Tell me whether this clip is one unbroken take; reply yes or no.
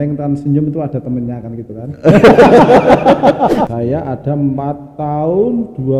no